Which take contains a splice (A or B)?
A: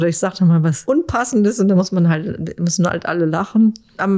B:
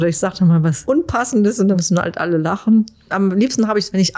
B